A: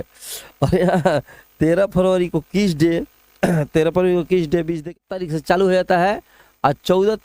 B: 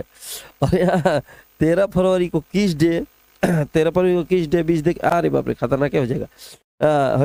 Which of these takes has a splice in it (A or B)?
A